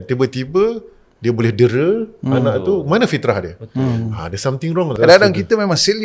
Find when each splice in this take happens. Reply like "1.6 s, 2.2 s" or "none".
4.9 s